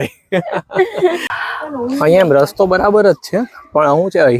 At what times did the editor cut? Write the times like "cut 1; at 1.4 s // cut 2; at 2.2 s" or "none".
cut 1; at 1.3 s